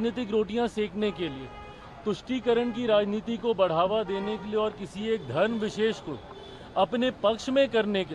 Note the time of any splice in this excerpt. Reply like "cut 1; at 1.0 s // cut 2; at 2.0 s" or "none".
none